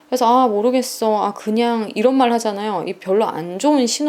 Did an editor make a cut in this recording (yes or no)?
no